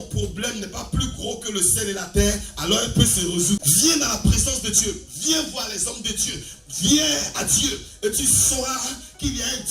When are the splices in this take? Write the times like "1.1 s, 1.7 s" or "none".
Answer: 3.6 s